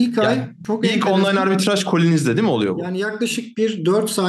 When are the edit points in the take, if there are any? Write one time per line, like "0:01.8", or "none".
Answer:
0:03.0